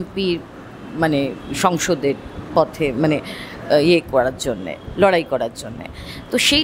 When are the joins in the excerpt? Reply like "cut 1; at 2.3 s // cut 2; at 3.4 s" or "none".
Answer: none